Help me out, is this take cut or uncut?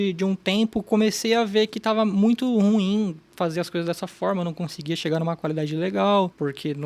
uncut